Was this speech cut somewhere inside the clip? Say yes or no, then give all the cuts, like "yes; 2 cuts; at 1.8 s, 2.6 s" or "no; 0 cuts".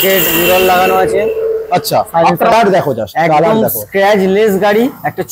yes; 1 cut; at 2.5 s